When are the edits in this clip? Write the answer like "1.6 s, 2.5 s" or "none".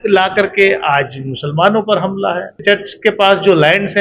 2.6 s